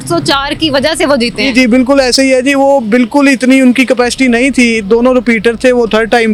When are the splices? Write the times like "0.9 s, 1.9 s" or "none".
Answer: none